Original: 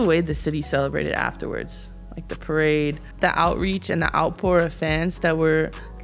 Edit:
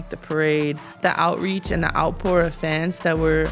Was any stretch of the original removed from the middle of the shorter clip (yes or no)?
no